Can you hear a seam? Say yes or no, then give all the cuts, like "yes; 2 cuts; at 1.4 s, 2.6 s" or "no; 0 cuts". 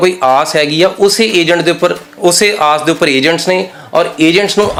no; 0 cuts